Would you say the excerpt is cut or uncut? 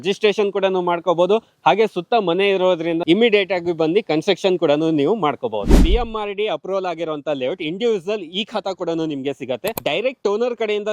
cut